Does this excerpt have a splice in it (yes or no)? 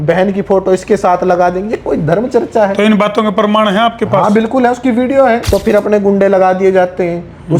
yes